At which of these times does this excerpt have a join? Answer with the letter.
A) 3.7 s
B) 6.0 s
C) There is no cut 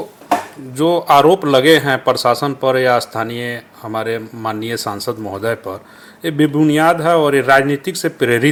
C